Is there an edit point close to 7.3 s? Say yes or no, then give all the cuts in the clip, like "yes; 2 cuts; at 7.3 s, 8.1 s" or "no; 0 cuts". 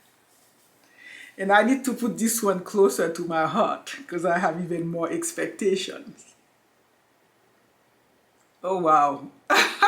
yes; 1 cut; at 7.3 s